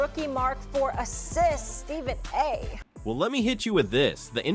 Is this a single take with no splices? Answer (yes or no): yes